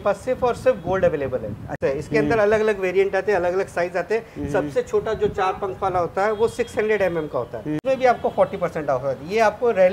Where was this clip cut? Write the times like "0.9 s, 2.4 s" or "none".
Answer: 1.8 s, 7.8 s